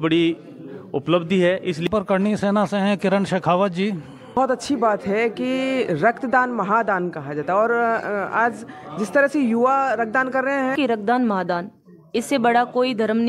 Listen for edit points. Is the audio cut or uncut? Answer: cut